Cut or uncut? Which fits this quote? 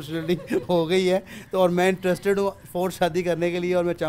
uncut